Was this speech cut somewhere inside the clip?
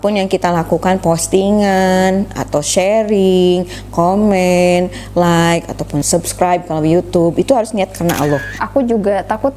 yes; 2 cuts; at 6.1 s, 8.6 s

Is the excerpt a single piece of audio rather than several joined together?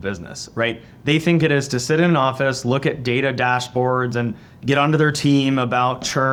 yes; 0 cuts

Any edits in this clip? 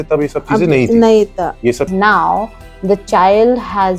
yes; 1 cut; at 1.9 s

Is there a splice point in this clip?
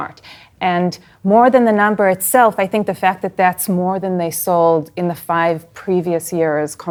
no; 0 cuts

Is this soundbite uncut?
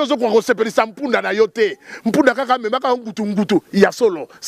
yes; 0 cuts

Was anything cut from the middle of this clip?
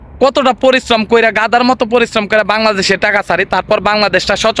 no; 0 cuts

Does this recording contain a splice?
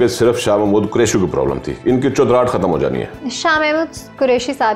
no; 0 cuts

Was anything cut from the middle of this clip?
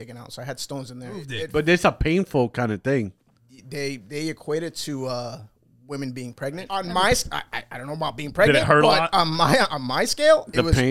yes; 2 cuts; at 1.4 s, 6.6 s

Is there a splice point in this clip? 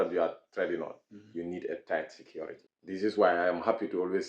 yes; 1 cut; at 3.1 s

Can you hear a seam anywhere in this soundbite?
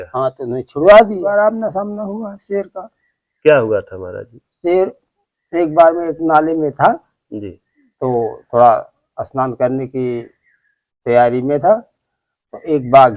yes; 1 cut; at 1.3 s

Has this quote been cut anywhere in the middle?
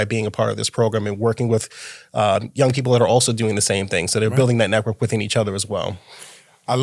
no; 0 cuts

